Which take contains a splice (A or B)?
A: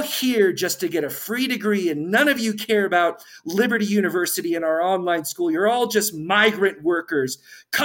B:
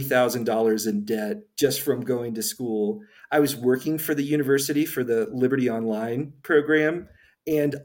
B